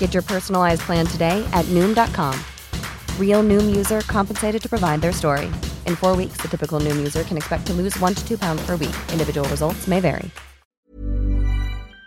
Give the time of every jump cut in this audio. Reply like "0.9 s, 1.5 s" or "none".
10.8 s